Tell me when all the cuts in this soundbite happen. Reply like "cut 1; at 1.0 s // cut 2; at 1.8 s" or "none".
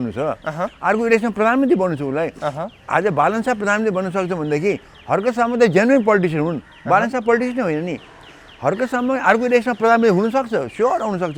none